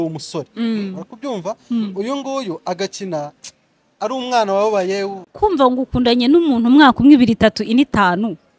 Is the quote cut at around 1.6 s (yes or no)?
no